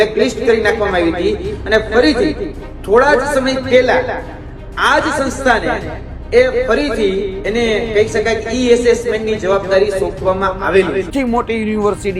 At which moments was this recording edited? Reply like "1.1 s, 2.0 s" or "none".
11.1 s